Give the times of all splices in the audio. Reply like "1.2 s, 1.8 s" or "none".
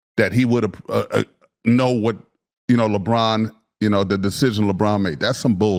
none